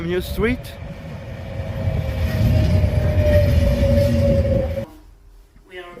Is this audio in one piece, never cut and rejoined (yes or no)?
no